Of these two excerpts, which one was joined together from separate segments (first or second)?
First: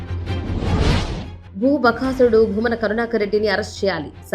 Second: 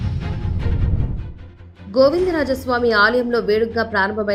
first